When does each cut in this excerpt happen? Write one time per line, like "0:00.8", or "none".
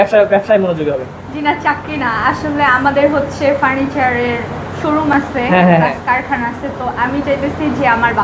none